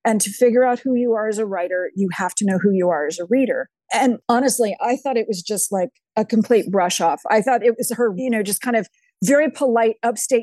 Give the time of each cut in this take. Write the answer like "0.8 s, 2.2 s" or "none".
3.8 s, 8.2 s